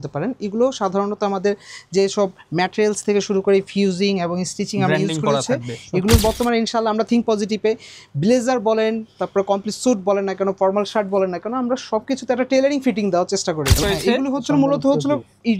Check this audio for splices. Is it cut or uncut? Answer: cut